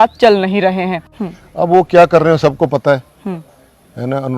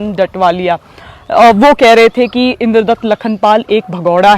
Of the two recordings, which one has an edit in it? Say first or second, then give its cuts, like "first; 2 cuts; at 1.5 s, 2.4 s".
first; 1 cut; at 1.0 s